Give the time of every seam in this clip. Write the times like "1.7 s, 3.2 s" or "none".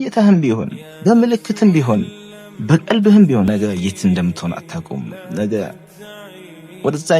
3.5 s